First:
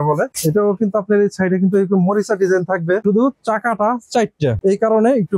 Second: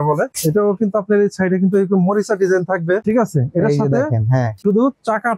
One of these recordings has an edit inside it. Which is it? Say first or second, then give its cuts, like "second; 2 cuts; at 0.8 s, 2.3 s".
first; 1 cut; at 3.0 s